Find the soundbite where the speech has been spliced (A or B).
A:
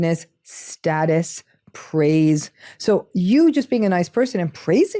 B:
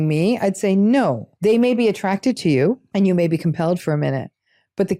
B